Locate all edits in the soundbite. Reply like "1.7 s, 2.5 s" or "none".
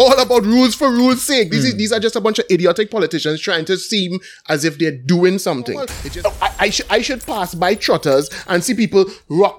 6.0 s